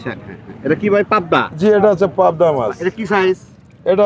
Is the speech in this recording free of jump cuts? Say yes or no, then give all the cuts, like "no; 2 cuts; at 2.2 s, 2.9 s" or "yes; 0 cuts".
yes; 0 cuts